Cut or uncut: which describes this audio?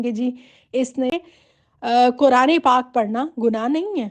cut